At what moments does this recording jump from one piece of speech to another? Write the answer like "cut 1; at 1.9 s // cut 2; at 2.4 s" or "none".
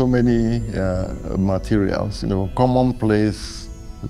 none